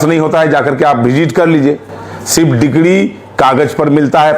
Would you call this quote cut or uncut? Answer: uncut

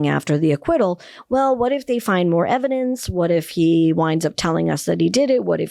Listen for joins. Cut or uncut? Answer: uncut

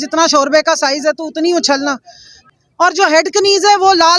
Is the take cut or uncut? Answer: cut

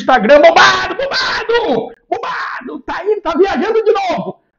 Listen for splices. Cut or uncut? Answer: uncut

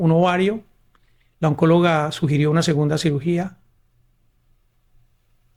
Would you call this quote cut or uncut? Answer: uncut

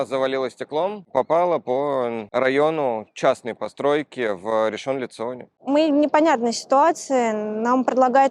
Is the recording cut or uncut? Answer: cut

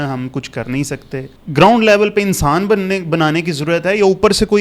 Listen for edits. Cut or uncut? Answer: cut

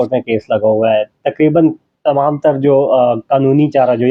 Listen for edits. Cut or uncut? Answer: uncut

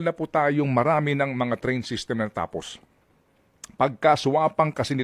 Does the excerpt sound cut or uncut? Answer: uncut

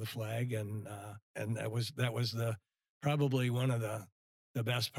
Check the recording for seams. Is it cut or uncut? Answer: cut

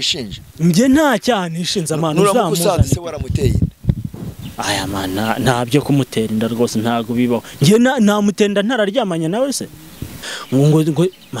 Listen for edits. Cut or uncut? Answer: cut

